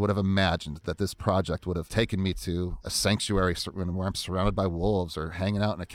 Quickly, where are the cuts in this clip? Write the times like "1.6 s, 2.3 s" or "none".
1.9 s, 2.8 s